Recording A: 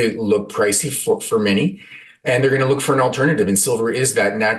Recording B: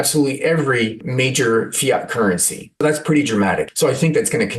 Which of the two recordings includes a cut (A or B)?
B